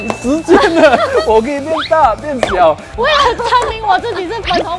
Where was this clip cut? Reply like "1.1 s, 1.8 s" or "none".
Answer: 2.9 s

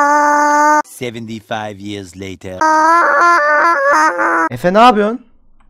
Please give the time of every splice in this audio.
none

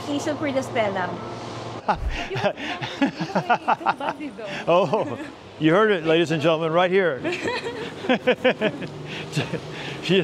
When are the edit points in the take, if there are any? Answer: 1.8 s

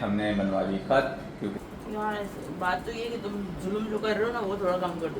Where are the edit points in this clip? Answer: 1.4 s

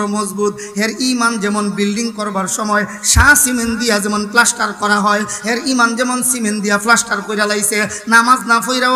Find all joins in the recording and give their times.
none

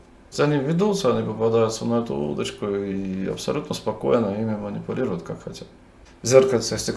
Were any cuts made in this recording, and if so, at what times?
6.0 s

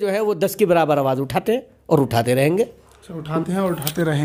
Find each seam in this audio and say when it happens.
none

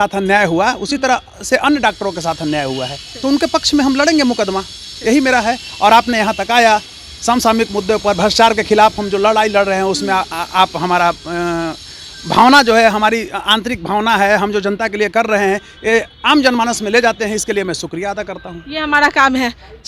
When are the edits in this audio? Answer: none

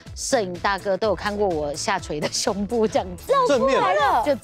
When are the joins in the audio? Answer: 3.2 s

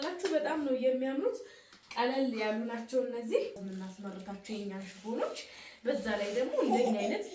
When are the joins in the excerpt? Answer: 3.6 s

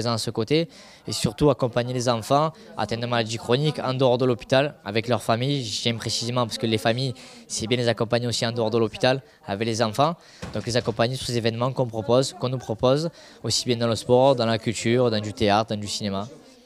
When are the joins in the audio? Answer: none

